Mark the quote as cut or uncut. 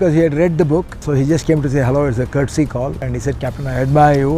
cut